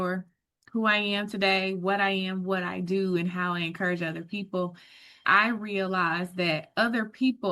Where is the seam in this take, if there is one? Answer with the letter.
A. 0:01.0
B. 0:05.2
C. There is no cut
B